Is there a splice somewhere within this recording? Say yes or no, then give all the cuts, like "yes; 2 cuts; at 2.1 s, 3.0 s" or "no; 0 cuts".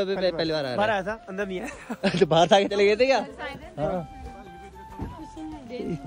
no; 0 cuts